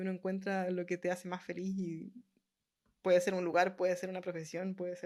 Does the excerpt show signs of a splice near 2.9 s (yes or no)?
no